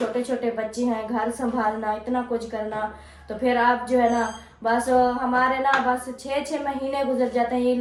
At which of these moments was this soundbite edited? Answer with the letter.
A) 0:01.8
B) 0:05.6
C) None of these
C